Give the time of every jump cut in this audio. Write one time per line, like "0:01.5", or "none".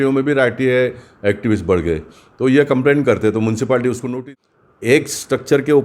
0:04.2